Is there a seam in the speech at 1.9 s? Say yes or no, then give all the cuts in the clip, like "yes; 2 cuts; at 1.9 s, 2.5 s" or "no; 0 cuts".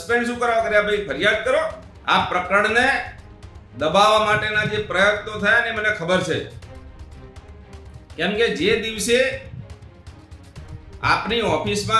yes; 1 cut; at 1.9 s